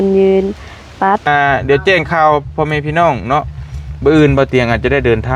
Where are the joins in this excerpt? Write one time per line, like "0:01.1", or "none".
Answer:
0:01.3